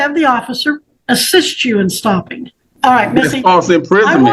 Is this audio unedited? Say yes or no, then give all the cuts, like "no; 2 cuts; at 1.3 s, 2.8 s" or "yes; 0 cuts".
no; 2 cuts; at 0.9 s, 2.6 s